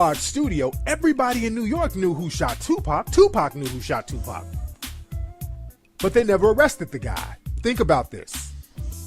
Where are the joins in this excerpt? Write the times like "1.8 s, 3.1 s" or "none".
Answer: 6.4 s